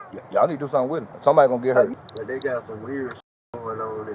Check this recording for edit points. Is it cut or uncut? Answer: cut